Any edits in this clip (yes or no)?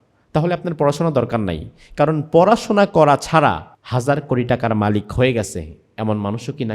yes